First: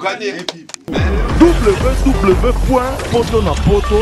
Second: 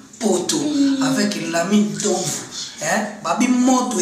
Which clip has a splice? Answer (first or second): first